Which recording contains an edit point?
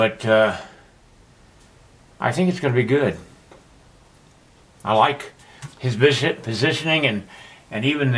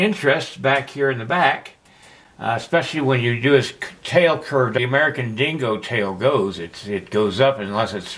second; 1 cut; at 4.8 s

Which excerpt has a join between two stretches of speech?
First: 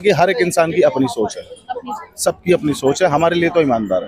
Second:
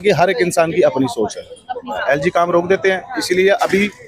second; 1 cut; at 1.9 s

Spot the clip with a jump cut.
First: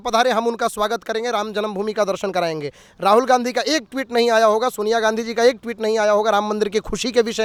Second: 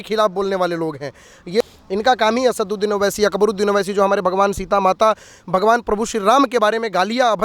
second; 1 cut; at 1.6 s

